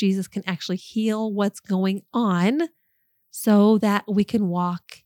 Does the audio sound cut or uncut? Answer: uncut